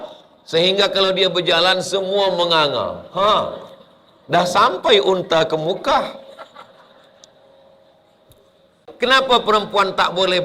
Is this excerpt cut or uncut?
cut